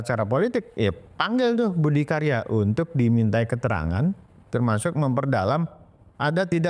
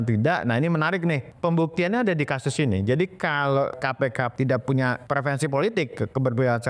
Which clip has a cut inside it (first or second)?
second